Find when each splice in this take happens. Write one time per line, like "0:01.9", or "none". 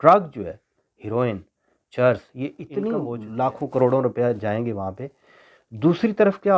0:03.2